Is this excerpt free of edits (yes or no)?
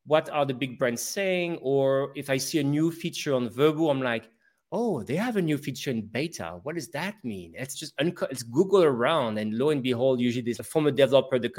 no